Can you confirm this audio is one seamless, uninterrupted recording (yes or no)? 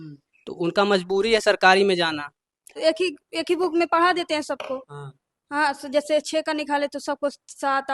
no